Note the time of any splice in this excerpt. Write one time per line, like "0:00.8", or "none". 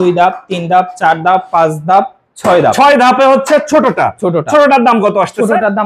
none

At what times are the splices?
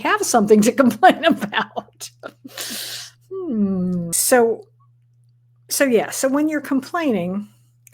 0:04.2

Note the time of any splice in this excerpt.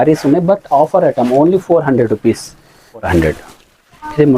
0:03.0

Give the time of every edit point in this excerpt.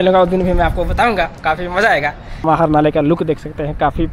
0:02.4

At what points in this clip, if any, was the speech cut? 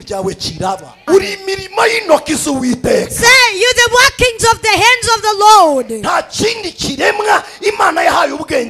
0:01.0

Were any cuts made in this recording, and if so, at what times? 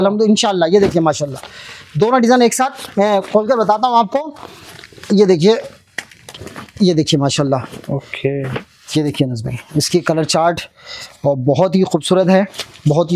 none

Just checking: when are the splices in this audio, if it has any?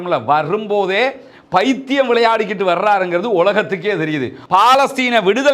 0:04.4

